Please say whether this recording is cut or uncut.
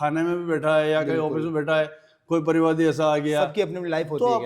uncut